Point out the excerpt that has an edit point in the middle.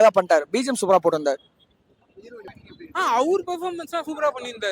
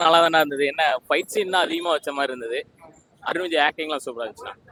first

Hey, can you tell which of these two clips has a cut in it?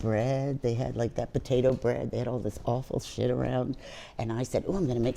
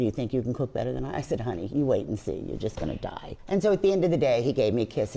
second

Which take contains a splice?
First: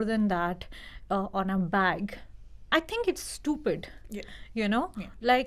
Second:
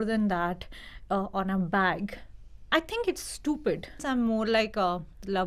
second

